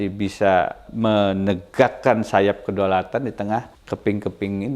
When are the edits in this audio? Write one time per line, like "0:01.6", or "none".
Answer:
0:00.8
0:03.8